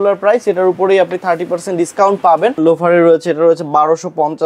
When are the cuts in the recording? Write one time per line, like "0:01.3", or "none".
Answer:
0:02.6